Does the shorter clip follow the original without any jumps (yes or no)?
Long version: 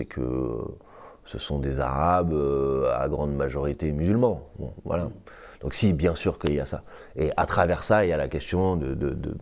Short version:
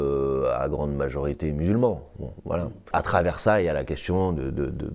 no